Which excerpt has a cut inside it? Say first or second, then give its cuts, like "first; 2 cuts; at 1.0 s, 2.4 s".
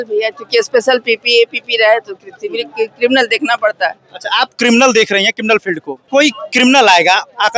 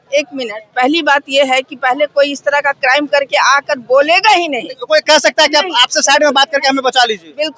first; 1 cut; at 5.9 s